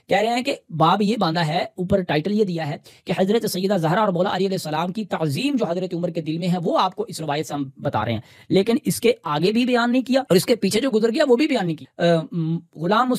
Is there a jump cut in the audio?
yes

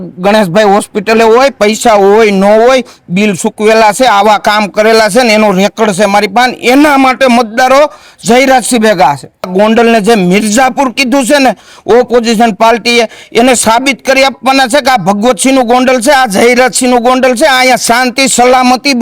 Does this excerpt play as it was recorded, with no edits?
no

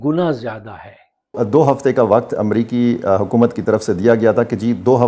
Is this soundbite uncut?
no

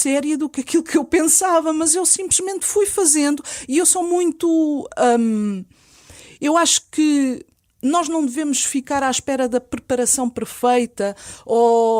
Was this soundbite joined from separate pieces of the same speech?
no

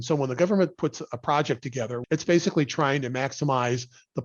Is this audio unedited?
no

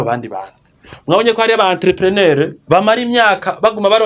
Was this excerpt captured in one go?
no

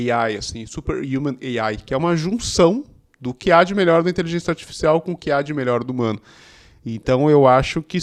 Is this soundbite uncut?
yes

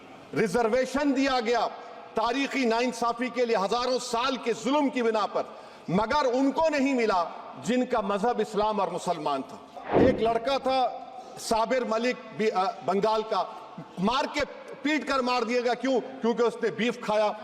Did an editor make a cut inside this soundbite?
yes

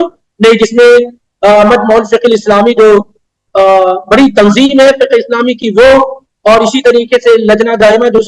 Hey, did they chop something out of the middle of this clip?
no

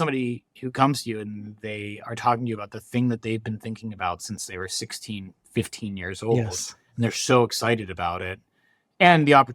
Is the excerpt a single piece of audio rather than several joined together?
yes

